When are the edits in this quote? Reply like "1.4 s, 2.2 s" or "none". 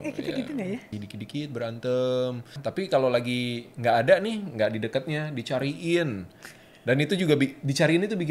0.9 s, 2.6 s